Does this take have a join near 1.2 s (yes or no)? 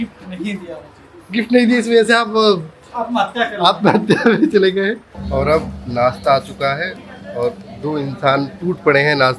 no